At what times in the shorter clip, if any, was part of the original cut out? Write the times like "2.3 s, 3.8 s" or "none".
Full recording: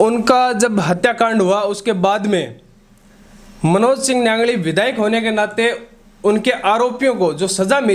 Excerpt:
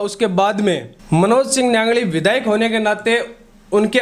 0.9 s